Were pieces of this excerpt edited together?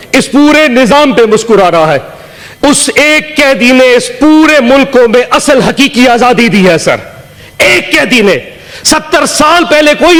no; 0 cuts

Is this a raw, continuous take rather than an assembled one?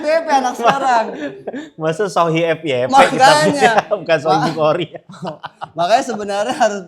yes; 0 cuts

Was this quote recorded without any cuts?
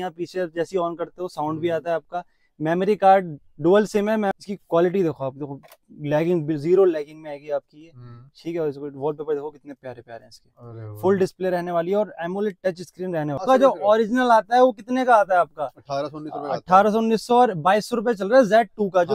no; 2 cuts; at 4.3 s, 13.4 s

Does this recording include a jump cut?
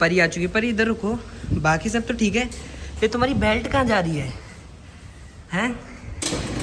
no; 0 cuts

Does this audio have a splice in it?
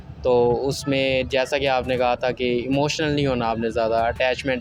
no; 0 cuts

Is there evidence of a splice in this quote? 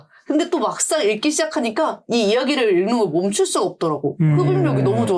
no; 0 cuts

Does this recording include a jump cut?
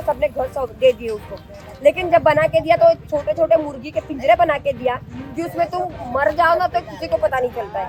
no; 0 cuts

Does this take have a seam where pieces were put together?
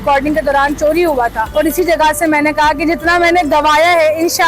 yes; 1 cut; at 1.4 s

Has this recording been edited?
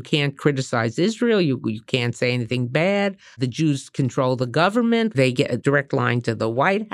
yes; 2 cuts; at 3.4 s, 5.6 s

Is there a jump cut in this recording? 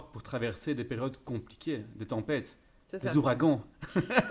no; 0 cuts

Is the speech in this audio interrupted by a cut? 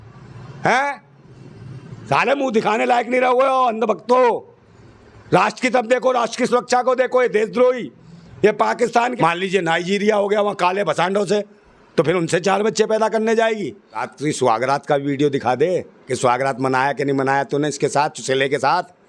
yes; 2 cuts; at 9.1 s, 14.1 s

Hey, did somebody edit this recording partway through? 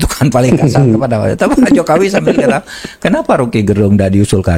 no; 0 cuts

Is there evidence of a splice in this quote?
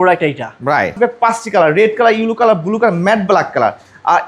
yes; 1 cut; at 0.9 s

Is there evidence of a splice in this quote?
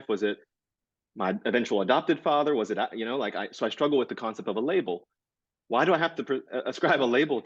no; 0 cuts

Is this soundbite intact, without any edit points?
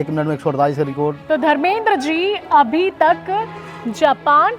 no; 1 cut; at 1.2 s

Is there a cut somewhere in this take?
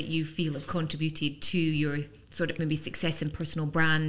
no; 0 cuts

